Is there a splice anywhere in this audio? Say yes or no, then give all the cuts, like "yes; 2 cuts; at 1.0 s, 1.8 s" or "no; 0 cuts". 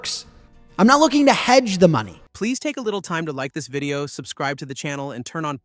yes; 1 cut; at 2.2 s